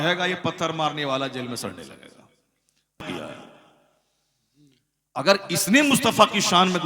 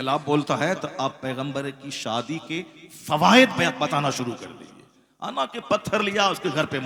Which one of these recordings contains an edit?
first; 1 cut; at 3.0 s

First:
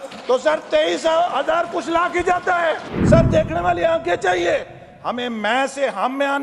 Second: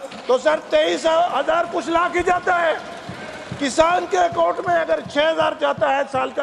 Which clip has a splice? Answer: first; 1 cut; at 2.9 s

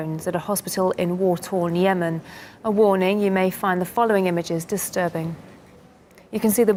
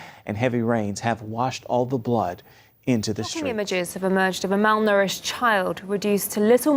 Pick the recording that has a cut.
second; 1 cut; at 4.9 s

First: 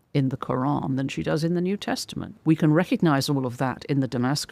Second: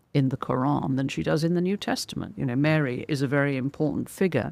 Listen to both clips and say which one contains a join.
first; 1 cut; at 2.4 s

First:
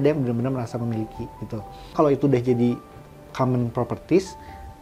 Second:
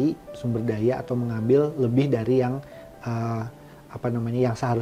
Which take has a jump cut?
first; 1 cut; at 1.9 s

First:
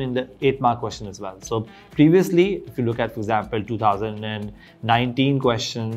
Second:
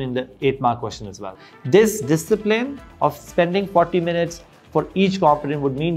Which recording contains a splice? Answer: second; 1 cut; at 1.3 s

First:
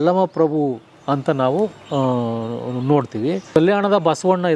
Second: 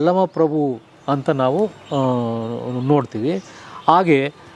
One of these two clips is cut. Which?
first; 1 cut; at 3.5 s

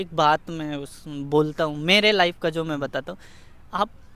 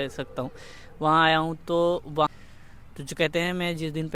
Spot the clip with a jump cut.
second; 1 cut; at 2.3 s

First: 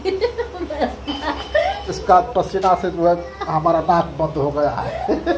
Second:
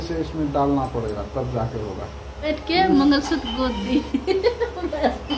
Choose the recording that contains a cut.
second; 1 cut; at 2.5 s

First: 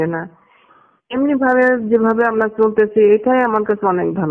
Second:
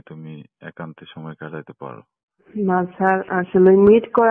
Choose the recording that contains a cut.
second; 1 cut; at 2.5 s

